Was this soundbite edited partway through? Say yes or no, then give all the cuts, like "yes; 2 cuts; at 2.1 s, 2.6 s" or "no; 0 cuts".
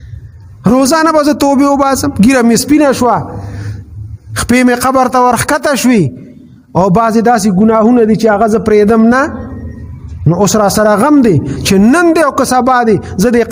no; 0 cuts